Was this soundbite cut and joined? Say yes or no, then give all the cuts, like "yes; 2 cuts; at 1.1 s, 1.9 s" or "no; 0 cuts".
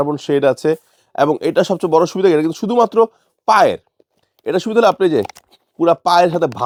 no; 0 cuts